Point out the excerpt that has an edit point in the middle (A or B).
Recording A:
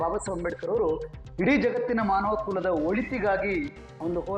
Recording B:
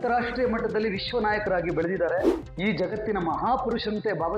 B